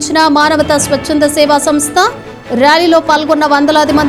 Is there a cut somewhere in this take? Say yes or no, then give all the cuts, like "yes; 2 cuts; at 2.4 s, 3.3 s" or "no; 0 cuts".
no; 0 cuts